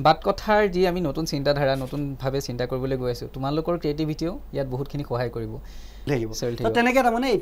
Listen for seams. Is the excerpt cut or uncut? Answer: cut